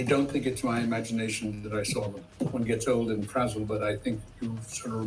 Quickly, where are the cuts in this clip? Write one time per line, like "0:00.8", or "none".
0:02.2